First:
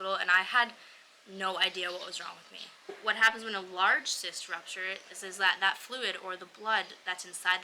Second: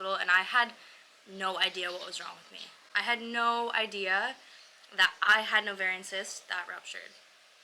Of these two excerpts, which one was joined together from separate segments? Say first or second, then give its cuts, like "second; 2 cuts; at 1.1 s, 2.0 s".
first; 1 cut; at 2.9 s